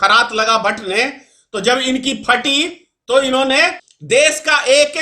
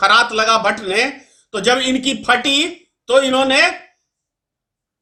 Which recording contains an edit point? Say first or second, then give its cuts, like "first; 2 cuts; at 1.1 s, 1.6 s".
first; 1 cut; at 3.9 s